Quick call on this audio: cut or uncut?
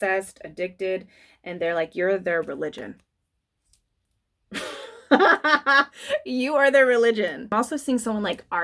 cut